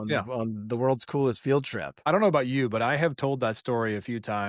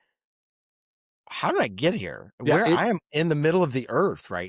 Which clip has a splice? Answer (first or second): first